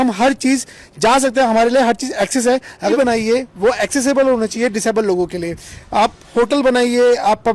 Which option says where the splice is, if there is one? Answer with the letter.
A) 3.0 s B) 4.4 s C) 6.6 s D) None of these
A